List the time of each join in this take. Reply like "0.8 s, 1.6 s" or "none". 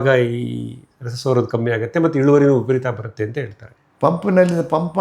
3.8 s